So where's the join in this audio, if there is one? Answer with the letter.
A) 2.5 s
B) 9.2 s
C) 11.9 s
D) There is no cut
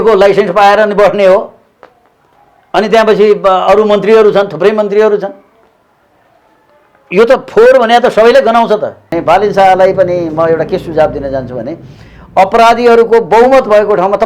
B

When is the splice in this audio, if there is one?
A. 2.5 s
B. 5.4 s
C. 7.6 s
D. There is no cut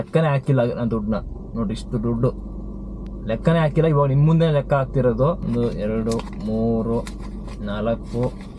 B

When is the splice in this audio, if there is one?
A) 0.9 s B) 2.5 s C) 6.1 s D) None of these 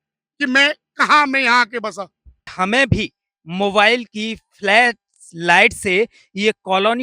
B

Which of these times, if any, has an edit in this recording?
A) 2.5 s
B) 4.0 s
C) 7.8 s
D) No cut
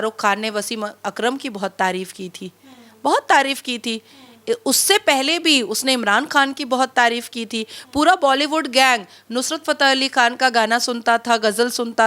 D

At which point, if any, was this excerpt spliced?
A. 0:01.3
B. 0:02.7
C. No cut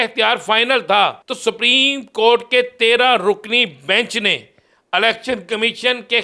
A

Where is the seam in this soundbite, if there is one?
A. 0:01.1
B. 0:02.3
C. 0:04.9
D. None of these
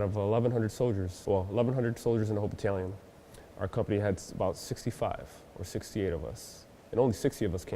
A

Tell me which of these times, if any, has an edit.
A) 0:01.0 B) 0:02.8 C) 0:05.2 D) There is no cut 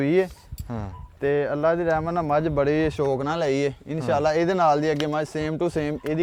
D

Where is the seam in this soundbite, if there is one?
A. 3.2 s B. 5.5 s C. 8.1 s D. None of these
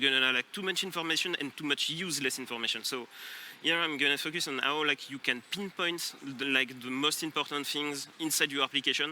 C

